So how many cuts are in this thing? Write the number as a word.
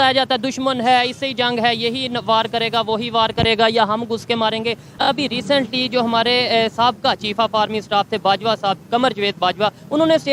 zero